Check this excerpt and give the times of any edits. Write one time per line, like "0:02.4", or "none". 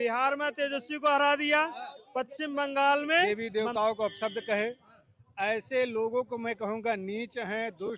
0:03.2